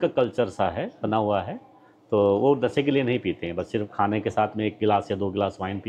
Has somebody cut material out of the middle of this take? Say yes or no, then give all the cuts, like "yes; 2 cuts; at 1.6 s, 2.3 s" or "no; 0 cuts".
no; 0 cuts